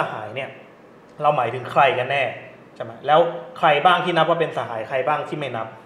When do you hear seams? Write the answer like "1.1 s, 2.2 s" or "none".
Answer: none